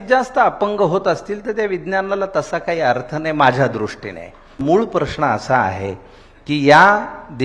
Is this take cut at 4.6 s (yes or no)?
yes